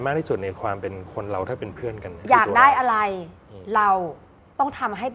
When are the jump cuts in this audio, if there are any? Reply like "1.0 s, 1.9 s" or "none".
2.2 s